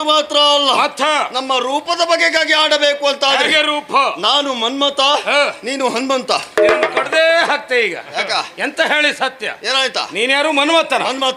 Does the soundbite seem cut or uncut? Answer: uncut